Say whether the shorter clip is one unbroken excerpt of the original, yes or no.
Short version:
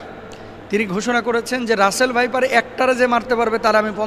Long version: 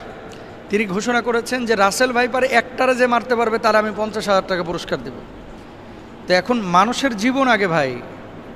yes